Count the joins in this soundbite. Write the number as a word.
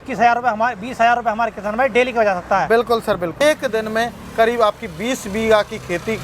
one